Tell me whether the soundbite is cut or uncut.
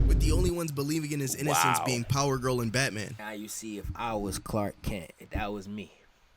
cut